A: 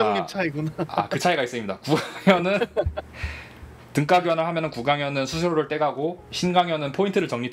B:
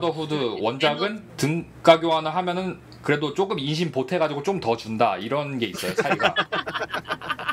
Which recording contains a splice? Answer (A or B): B